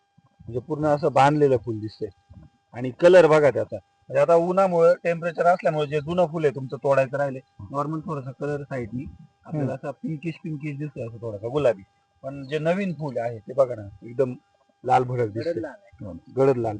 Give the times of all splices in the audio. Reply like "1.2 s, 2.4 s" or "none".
7.5 s